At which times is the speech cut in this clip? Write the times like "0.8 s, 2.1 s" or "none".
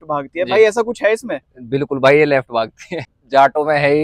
3.0 s